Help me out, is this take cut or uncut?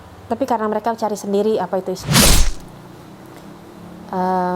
cut